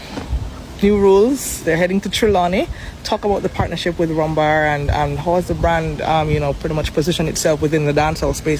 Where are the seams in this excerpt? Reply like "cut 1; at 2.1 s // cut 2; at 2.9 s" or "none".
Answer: none